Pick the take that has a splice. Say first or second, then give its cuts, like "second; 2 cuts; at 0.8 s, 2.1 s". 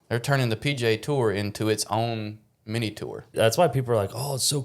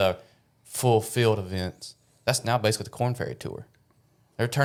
first; 1 cut; at 3.3 s